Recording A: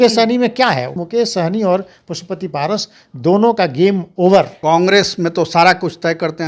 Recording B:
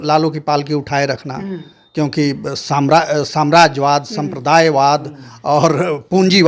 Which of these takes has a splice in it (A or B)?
A